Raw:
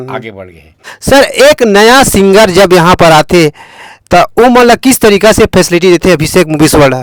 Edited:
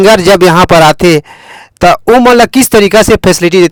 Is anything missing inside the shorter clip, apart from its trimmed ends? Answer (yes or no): no